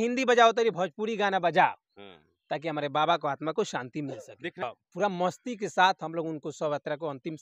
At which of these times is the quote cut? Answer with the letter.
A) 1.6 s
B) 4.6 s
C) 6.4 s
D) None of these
B